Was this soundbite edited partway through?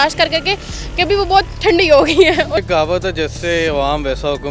yes; 1 cut; at 2.6 s

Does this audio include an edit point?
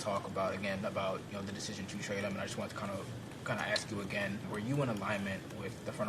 yes; 1 cut; at 4.4 s

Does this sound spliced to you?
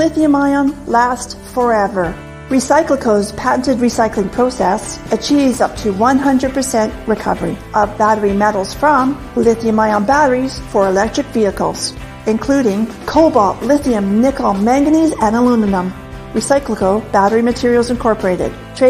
yes; 1 cut; at 1.2 s

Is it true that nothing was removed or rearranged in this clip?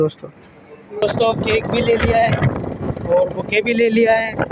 no; 1 cut; at 1.0 s

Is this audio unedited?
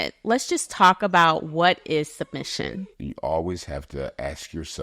no; 1 cut; at 2.9 s

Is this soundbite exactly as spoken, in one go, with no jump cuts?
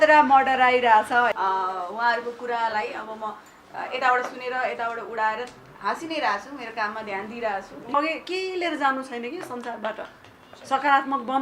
no; 2 cuts; at 1.3 s, 7.9 s

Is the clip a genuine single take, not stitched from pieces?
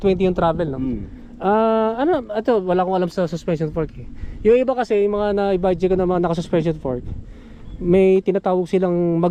yes; 0 cuts

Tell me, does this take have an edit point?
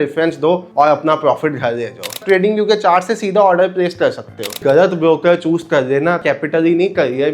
yes; 3 cuts; at 2.2 s, 4.6 s, 6.2 s

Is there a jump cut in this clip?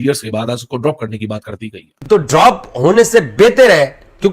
yes; 1 cut; at 1.9 s

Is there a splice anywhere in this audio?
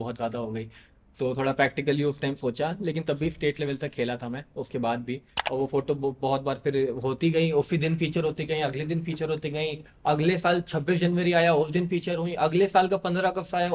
yes; 1 cut; at 5.3 s

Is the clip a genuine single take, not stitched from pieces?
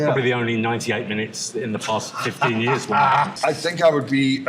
no; 1 cut; at 3.3 s

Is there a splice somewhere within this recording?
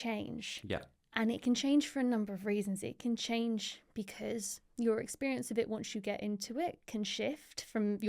no; 0 cuts

